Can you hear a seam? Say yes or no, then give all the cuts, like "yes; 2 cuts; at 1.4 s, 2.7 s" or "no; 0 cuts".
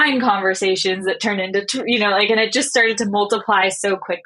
no; 0 cuts